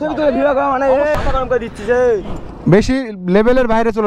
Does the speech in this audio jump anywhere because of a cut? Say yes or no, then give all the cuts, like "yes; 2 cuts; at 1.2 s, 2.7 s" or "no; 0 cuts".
yes; 1 cut; at 1.1 s